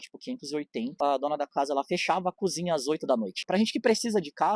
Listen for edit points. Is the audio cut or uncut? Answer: cut